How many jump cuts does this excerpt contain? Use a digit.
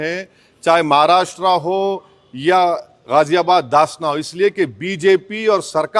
0